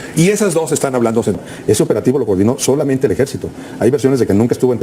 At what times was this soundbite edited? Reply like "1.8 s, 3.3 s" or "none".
1.5 s